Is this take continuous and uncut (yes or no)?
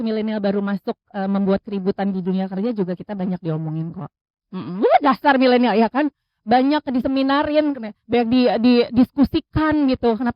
yes